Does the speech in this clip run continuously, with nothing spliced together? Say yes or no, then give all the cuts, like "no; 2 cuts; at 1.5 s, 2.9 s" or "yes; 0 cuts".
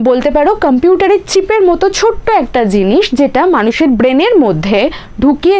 yes; 0 cuts